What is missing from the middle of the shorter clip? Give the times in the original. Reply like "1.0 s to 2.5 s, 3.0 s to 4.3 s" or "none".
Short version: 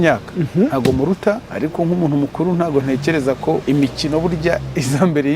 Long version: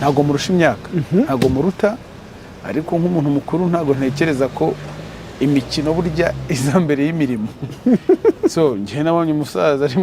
2.0 s to 2.6 s, 4.8 s to 5.4 s